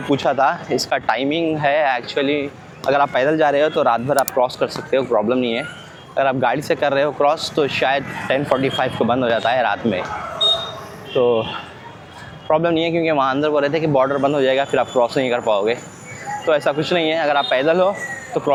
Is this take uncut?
yes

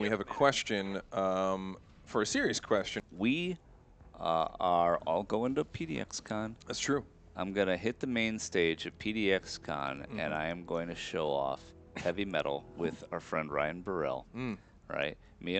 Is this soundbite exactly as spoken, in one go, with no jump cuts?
no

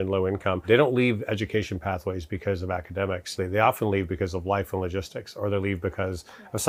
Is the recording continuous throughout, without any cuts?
yes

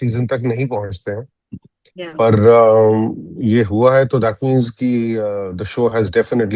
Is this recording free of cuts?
yes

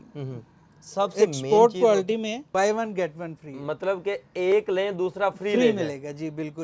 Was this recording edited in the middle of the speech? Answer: yes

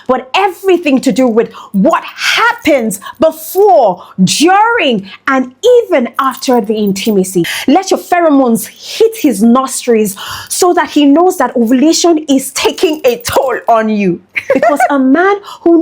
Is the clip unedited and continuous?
no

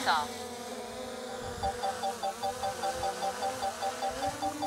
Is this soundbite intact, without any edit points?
yes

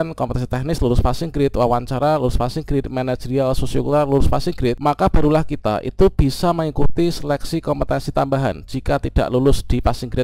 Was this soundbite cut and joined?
yes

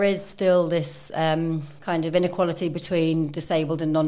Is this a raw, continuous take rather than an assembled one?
no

